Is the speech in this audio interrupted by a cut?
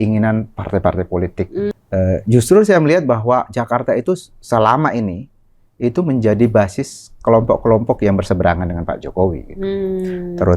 yes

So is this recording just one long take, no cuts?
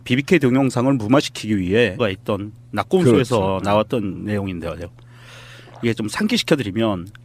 yes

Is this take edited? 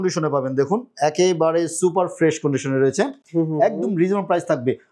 no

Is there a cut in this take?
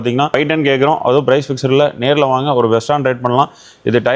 no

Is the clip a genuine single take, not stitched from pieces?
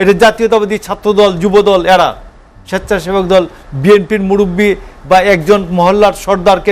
yes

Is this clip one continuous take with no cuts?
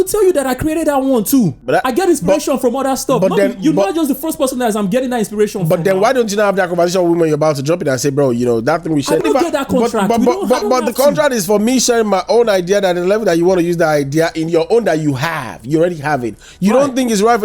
no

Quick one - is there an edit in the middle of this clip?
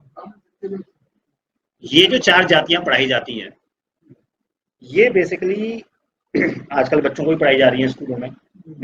no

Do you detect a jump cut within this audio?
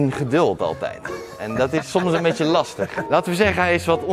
yes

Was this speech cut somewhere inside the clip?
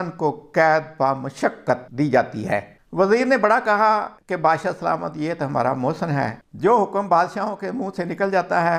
yes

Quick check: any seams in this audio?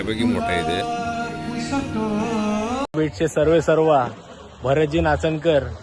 no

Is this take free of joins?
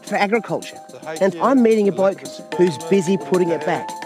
no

